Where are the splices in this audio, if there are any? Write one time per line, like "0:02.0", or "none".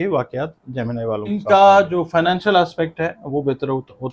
0:01.3